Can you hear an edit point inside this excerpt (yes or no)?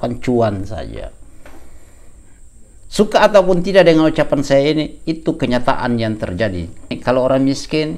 yes